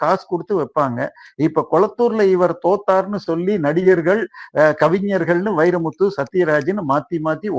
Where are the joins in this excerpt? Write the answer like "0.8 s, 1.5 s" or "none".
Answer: none

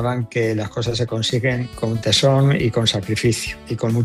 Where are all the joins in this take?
none

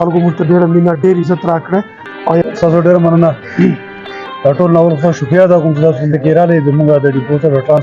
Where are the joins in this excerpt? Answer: 2.4 s

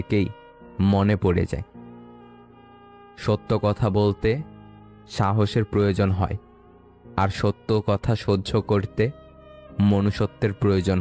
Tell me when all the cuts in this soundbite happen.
1.8 s, 3.2 s

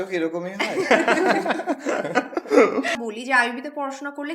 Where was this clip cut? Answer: 3.0 s

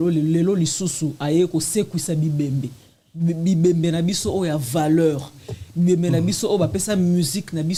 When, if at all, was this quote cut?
none

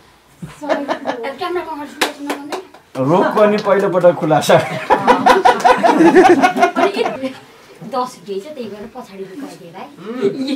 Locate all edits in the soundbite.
none

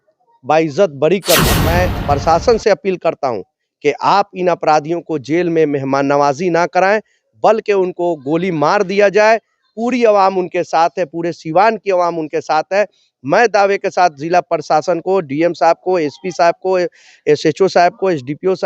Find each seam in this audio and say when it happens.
1.7 s

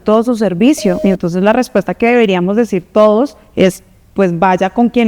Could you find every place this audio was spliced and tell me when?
1.0 s

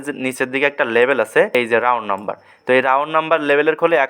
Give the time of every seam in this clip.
1.5 s

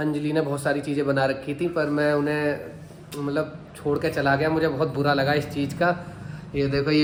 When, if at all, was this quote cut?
none

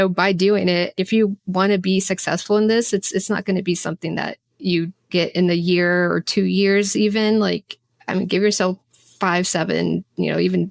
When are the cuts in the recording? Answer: 0.9 s, 5.1 s

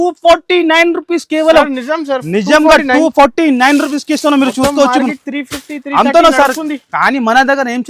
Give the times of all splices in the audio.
none

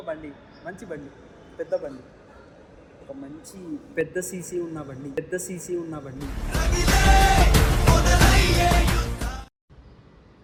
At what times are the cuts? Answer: none

